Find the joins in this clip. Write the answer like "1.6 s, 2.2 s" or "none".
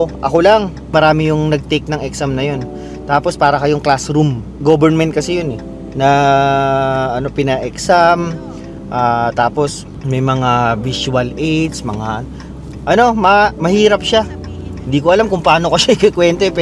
0.9 s